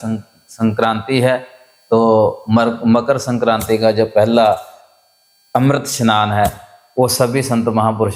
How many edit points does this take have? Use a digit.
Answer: 0